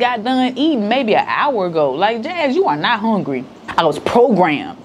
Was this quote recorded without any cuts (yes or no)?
yes